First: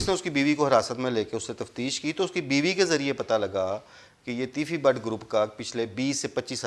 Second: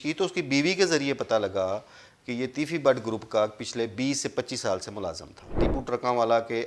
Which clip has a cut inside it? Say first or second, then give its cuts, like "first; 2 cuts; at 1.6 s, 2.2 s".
second; 1 cut; at 5.6 s